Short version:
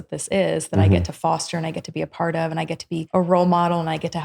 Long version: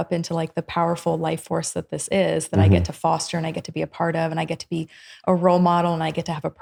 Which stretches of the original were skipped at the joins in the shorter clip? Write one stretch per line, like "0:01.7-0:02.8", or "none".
0:04.9-0:05.2